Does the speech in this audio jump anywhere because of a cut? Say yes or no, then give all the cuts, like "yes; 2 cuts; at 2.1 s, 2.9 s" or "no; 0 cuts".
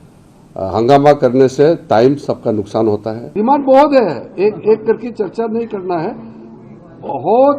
yes; 1 cut; at 3.2 s